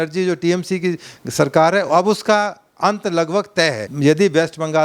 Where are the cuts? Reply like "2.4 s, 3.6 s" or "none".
3.9 s